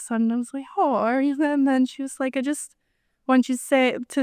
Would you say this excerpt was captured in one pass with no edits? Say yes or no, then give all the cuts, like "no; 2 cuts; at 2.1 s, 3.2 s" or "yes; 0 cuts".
yes; 0 cuts